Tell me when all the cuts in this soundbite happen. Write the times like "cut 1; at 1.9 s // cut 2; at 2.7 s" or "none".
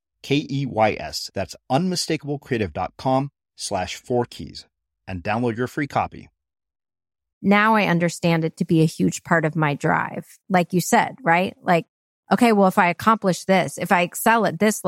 cut 1; at 7.3 s